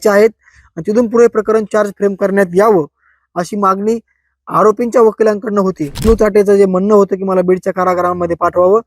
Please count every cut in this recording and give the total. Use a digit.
1